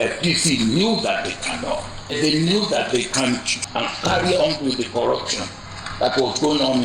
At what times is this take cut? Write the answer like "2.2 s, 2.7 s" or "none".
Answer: 2.2 s, 3.7 s